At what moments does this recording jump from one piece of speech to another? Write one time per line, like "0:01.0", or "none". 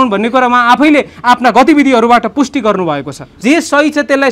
0:03.3